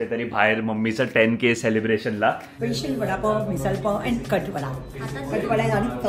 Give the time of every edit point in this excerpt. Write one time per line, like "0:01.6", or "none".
0:02.5